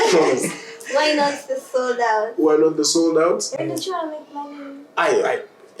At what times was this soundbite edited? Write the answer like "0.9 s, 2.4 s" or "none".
none